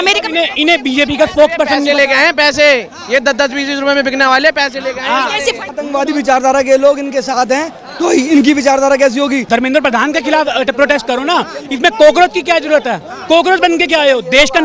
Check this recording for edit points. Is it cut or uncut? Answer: cut